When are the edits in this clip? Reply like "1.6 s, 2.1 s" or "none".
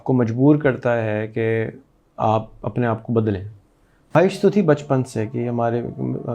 4.1 s